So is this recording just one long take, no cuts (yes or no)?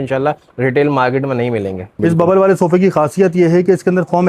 no